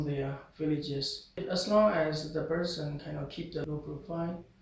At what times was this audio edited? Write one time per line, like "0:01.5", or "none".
0:01.4
0:03.6